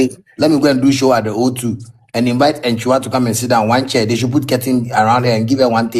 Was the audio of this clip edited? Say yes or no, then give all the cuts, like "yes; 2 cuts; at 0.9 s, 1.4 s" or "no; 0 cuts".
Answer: no; 0 cuts